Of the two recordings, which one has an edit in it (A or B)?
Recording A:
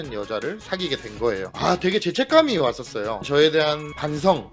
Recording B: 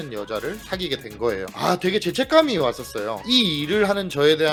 A